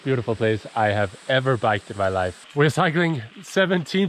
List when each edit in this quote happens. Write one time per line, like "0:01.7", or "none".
0:02.4